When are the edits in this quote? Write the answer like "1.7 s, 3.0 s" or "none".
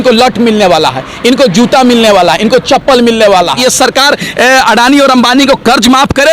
3.6 s